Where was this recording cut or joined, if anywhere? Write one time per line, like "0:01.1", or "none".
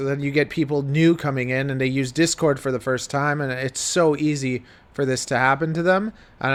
none